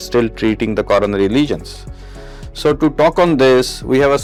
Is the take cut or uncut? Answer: uncut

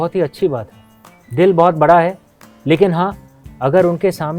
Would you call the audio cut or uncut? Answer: uncut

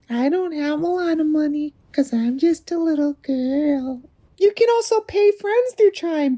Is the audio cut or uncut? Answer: cut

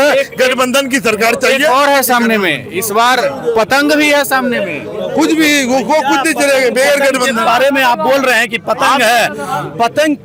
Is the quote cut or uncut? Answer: uncut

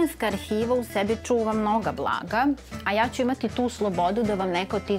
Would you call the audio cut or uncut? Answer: uncut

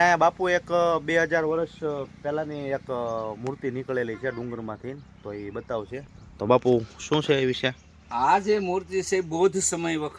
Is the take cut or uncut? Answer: uncut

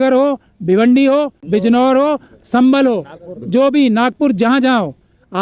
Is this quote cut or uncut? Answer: cut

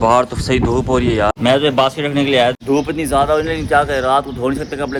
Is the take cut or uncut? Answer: uncut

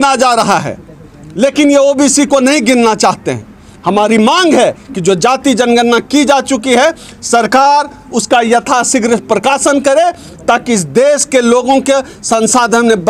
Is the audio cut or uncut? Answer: uncut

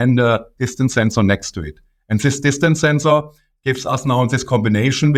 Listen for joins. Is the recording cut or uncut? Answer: uncut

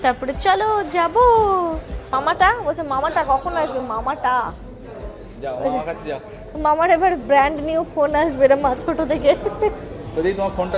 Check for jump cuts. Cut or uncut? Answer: cut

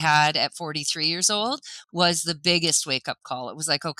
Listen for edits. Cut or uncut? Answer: uncut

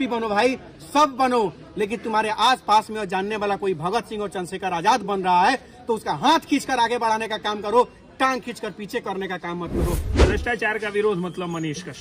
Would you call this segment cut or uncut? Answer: cut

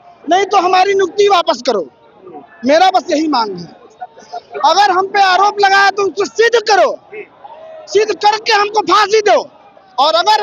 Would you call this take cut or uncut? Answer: uncut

